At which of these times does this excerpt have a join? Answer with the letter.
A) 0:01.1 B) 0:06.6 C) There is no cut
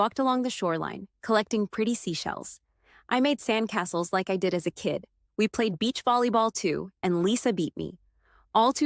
A